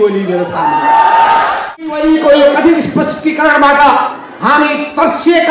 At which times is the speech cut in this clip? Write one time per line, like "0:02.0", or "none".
0:01.9